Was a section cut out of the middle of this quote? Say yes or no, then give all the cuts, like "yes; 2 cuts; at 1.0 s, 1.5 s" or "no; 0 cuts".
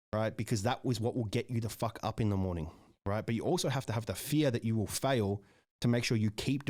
no; 0 cuts